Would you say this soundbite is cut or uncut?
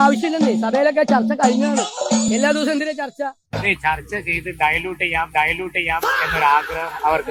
uncut